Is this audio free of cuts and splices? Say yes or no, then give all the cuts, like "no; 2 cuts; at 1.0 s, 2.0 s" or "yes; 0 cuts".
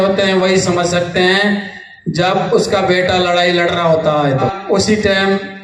no; 1 cut; at 4.5 s